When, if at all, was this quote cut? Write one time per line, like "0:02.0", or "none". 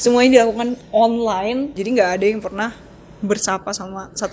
0:01.7

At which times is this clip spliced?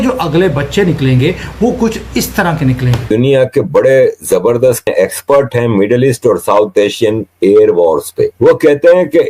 0:03.0
0:04.9
0:08.3

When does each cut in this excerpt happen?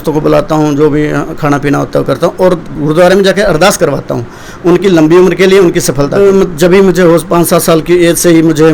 0:06.1

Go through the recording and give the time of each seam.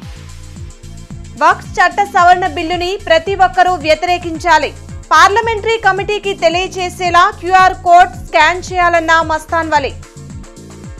0:01.2

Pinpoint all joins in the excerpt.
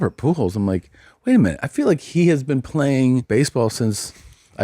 0:03.2

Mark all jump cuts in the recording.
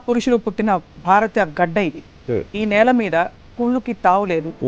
none

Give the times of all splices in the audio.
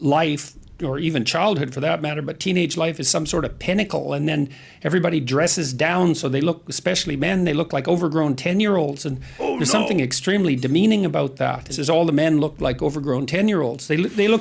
0:11.7

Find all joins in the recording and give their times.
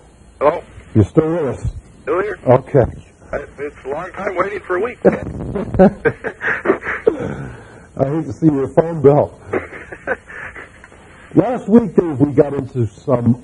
0:05.5

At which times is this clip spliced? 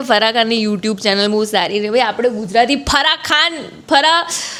none

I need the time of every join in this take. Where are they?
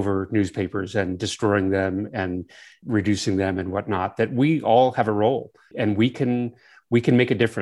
0:02.8
0:05.7

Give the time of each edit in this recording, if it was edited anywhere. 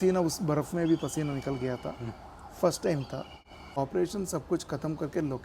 0:03.8

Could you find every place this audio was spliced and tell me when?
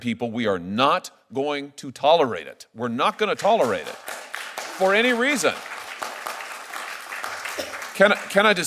none

